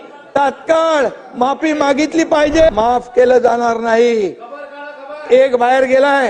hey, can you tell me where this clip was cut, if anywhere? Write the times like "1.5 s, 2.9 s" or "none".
2.7 s